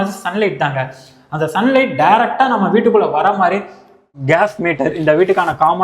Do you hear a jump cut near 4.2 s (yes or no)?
yes